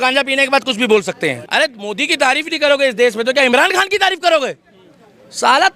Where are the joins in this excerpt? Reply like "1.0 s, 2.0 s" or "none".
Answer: 1.4 s